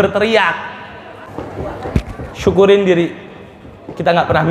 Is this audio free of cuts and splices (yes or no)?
no